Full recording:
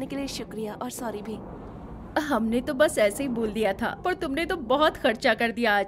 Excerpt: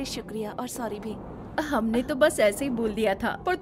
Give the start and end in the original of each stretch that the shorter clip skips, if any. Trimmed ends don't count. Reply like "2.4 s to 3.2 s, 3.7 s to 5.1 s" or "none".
1.6 s to 1.9 s